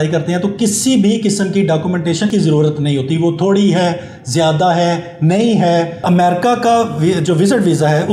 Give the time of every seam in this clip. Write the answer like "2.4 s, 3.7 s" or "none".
2.3 s, 6.0 s